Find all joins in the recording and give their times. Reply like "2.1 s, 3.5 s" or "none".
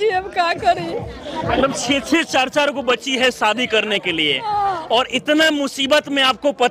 none